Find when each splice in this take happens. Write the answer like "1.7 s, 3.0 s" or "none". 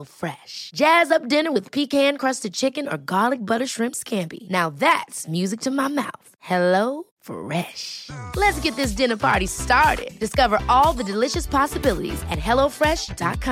none